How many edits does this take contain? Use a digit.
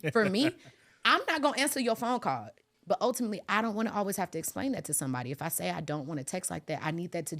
1